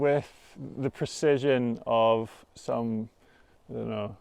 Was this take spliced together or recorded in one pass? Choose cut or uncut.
uncut